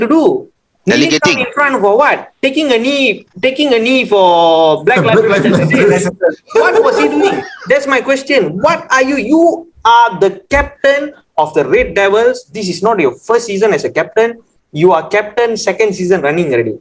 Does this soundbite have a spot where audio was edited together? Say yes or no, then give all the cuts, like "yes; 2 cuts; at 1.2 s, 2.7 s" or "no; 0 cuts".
no; 0 cuts